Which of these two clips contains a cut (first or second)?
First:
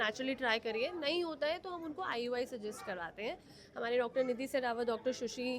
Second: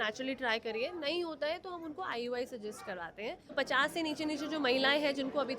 second